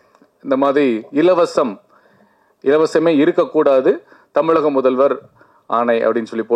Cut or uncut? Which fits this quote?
uncut